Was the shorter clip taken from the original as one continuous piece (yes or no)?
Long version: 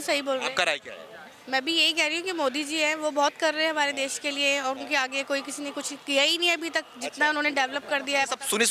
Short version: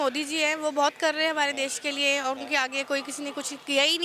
yes